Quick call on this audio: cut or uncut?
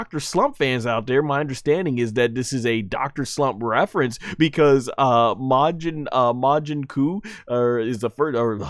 uncut